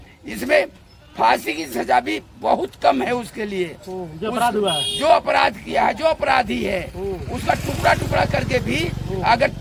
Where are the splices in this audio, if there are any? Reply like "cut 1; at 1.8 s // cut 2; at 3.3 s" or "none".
none